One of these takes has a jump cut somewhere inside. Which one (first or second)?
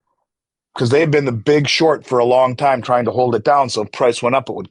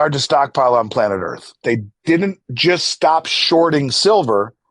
second